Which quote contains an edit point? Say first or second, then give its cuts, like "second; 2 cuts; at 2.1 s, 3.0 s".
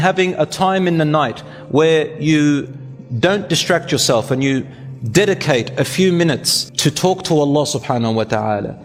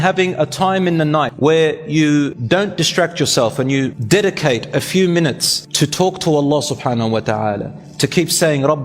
second; 3 cuts; at 1.3 s, 2.4 s, 4.0 s